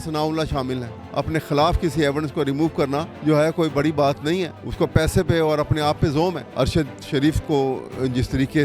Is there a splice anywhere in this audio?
yes; 4 cuts; at 1.0 s, 3.1 s, 4.6 s, 6.4 s

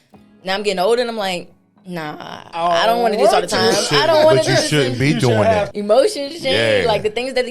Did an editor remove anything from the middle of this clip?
yes; 1 cut; at 5.7 s

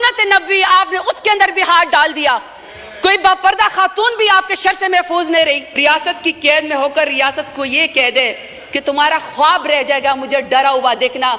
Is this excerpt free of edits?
no; 1 cut; at 5.7 s

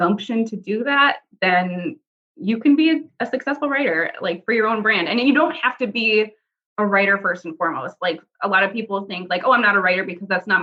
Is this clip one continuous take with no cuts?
yes; 0 cuts

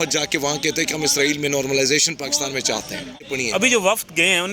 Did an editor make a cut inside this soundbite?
yes; 1 cut; at 3.3 s

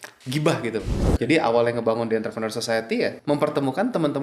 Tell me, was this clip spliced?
yes; 2 cuts; at 0.9 s, 3.2 s

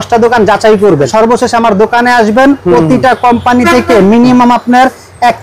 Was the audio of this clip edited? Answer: yes; 1 cut; at 1.1 s

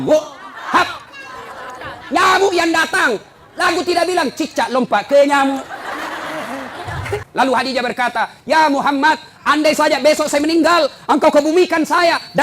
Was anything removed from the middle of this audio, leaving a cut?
yes; 1 cut; at 7.3 s

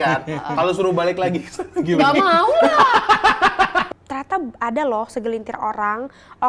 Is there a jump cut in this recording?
yes; 1 cut; at 3.9 s

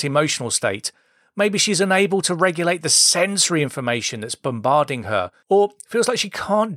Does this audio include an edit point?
no; 0 cuts

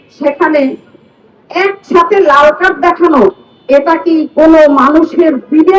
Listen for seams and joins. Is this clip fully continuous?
yes; 0 cuts

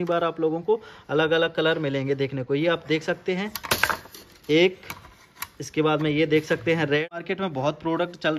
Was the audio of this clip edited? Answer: yes; 1 cut; at 7.0 s

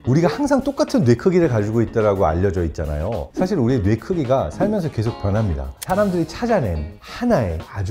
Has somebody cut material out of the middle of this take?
yes; 2 cuts; at 3.3 s, 5.7 s

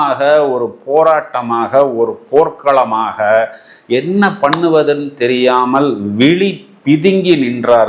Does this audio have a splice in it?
no; 0 cuts

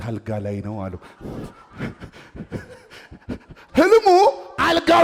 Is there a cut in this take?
no; 0 cuts

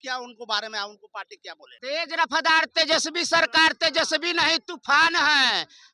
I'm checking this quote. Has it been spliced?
yes; 1 cut; at 1.7 s

